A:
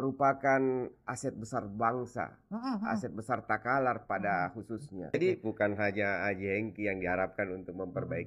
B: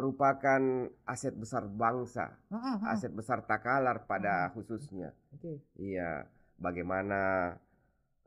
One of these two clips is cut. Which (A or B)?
A